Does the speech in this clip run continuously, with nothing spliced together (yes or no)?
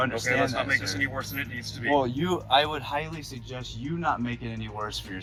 yes